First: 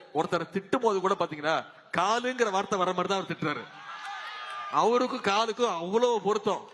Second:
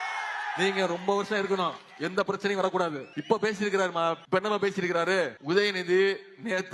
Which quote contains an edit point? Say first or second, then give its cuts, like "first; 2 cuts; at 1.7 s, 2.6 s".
second; 3 cuts; at 3.1 s, 4.2 s, 5.4 s